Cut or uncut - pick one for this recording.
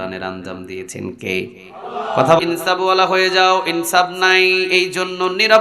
cut